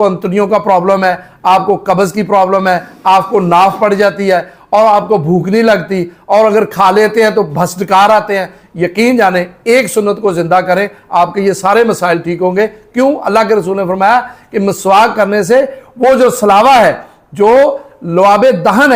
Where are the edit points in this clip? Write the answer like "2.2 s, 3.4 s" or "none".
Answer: none